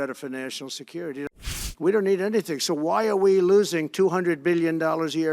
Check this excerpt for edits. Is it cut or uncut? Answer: cut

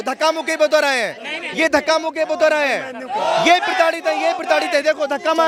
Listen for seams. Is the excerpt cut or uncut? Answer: uncut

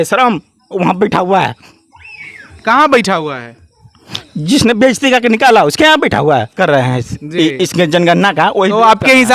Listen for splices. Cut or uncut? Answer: cut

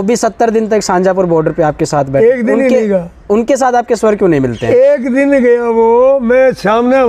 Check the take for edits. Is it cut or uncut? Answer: uncut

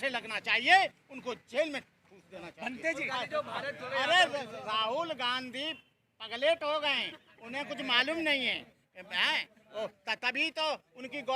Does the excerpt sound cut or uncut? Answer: cut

